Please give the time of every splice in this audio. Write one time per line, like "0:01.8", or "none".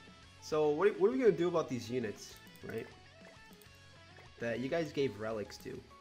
0:03.0
0:04.4

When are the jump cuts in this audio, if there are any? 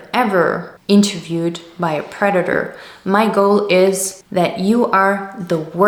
none

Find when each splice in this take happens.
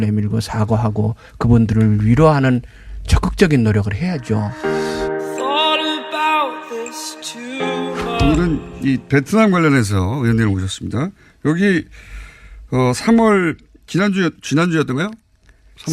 0:04.5

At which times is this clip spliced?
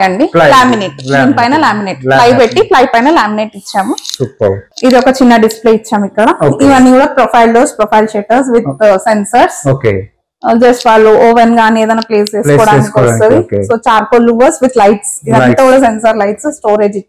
0:04.7

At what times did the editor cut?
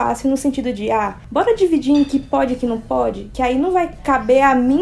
0:01.2
0:03.2

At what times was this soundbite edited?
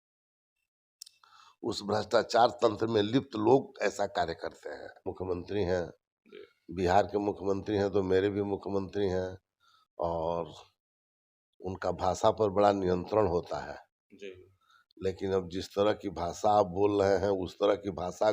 0:05.1

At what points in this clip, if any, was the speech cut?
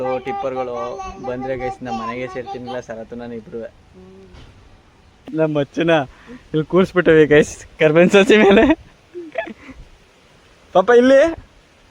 0:05.3

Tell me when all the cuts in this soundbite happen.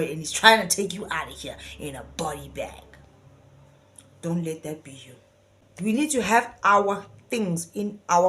0:05.6

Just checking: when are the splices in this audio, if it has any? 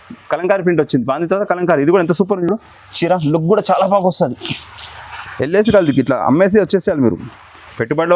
none

